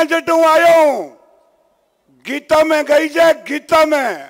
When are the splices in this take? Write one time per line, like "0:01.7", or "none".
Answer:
none

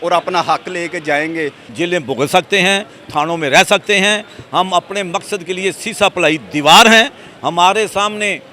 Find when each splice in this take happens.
0:01.6

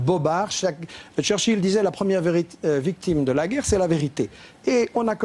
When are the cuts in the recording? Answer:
none

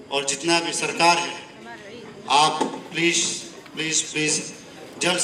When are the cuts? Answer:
none

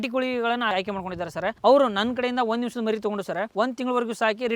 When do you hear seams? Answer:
none

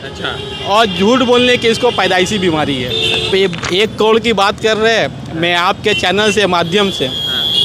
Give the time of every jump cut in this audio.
0:03.3

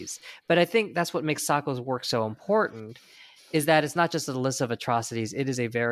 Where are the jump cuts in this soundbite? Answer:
none

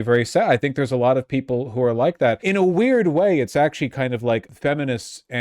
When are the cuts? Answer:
0:02.4
0:04.5

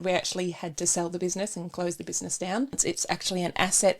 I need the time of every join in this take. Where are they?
0:02.8

